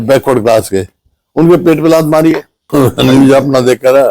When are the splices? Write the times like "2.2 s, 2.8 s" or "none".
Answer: 2.5 s